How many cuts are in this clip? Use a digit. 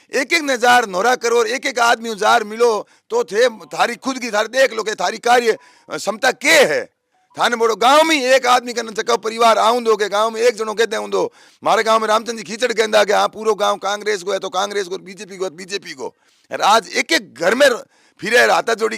0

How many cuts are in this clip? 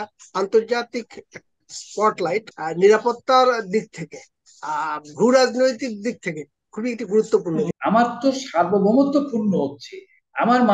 2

